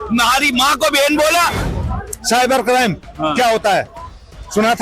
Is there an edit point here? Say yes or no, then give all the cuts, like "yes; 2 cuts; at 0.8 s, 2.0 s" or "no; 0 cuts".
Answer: yes; 1 cut; at 1.6 s